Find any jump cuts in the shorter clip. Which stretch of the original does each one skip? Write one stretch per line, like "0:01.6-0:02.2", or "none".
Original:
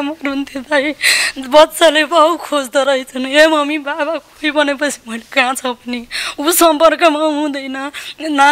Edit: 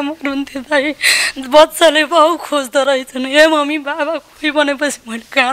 none